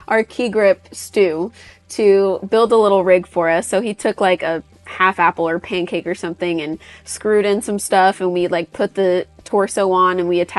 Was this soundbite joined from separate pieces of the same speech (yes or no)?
no